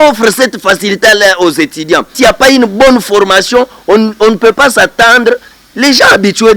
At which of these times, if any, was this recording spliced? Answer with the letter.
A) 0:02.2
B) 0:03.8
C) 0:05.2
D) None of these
A